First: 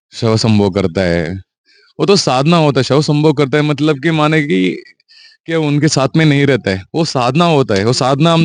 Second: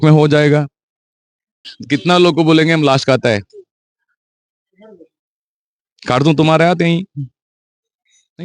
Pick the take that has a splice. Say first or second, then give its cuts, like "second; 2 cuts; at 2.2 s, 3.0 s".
second; 1 cut; at 1.7 s